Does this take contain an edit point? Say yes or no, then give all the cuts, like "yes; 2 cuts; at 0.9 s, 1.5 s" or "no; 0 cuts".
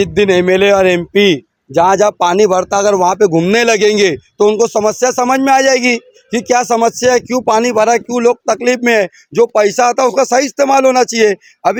no; 0 cuts